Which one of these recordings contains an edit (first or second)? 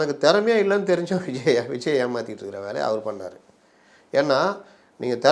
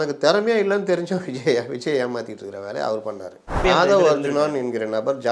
second